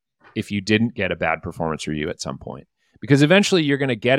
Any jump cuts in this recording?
no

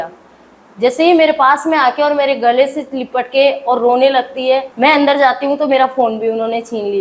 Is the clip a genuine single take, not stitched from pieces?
no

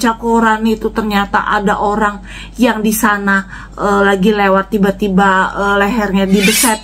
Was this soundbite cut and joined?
no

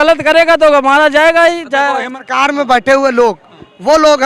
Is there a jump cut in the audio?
yes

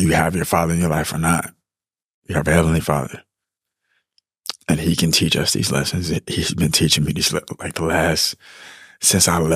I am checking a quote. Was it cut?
no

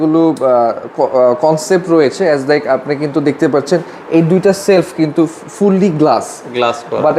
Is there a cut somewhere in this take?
no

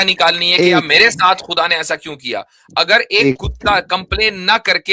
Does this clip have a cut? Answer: no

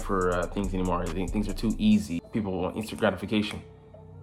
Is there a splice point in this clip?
yes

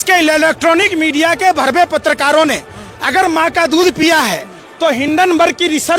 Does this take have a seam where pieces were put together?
no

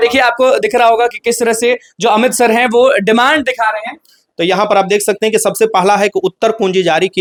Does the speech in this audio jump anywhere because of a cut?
no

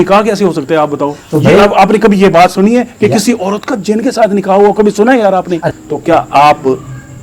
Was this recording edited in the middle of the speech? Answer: yes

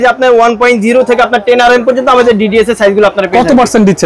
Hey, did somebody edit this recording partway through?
no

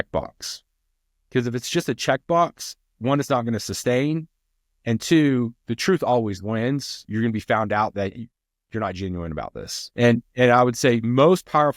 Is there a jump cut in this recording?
yes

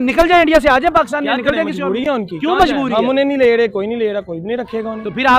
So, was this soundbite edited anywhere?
no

